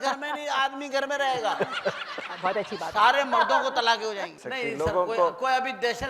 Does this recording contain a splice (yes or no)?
yes